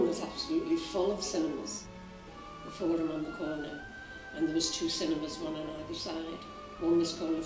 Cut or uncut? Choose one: uncut